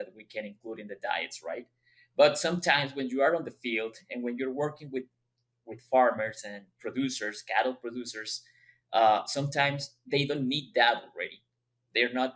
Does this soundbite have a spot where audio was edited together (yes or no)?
no